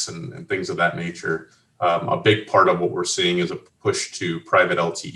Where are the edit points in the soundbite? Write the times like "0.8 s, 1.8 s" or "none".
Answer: none